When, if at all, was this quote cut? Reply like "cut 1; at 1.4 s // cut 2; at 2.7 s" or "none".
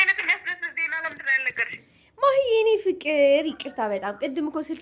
none